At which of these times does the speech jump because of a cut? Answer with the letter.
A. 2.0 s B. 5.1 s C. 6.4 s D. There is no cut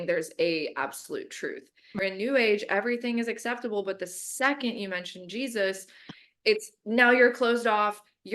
A